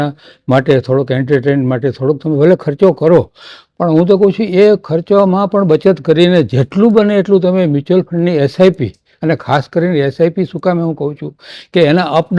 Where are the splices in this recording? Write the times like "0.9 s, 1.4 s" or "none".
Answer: none